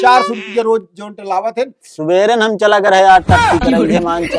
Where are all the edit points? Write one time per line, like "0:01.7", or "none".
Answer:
0:01.9